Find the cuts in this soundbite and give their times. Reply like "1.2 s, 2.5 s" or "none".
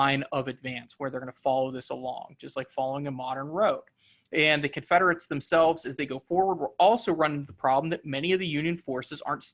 none